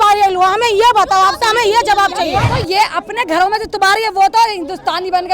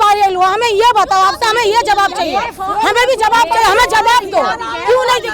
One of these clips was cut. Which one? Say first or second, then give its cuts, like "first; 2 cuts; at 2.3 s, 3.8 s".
first; 1 cut; at 2.5 s